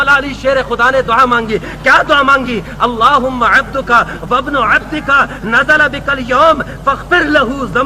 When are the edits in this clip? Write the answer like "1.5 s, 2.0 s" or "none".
none